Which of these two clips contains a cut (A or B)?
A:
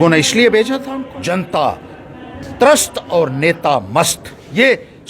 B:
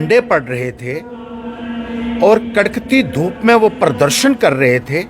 A